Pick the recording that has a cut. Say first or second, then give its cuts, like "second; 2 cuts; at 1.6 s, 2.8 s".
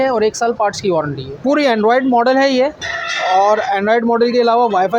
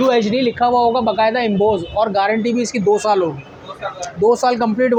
first; 1 cut; at 1.4 s